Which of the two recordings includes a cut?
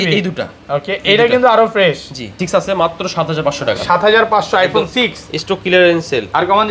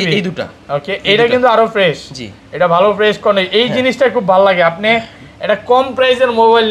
first; 1 cut; at 2.4 s

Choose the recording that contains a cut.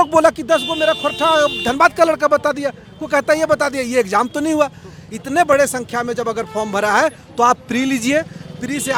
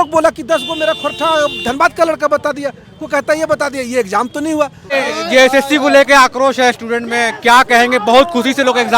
second; 1 cut; at 4.9 s

